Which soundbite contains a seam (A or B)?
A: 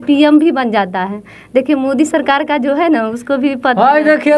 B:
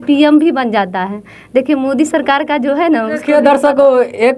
B